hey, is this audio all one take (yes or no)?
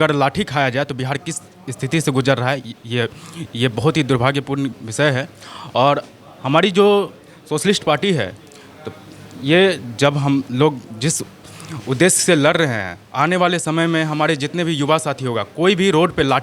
yes